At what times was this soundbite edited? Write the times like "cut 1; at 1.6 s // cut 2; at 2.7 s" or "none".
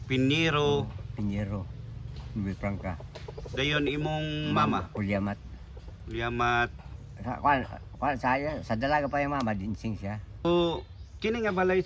cut 1; at 10.4 s